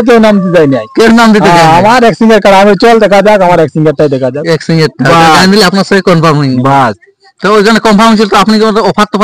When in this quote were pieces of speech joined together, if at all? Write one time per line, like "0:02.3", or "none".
none